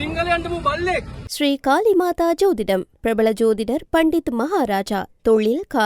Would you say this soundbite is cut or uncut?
cut